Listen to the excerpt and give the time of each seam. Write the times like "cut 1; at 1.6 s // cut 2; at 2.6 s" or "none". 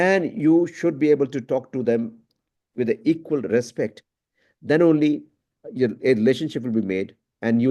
none